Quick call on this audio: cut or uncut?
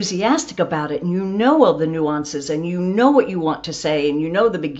uncut